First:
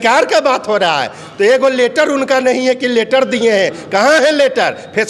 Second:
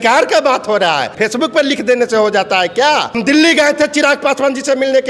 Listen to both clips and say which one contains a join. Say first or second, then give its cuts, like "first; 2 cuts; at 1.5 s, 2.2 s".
second; 2 cuts; at 1.1 s, 3.1 s